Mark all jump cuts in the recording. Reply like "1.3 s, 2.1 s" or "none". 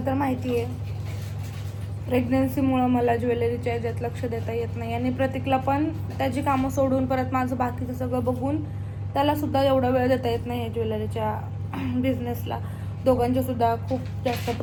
none